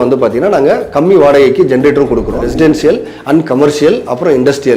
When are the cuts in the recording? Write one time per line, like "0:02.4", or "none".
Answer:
0:02.4

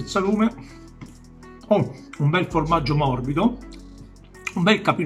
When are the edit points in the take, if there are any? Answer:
none

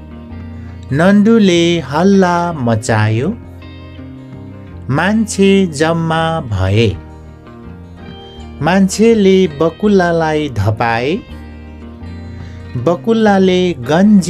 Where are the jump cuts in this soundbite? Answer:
0:00.9
0:11.2
0:12.7

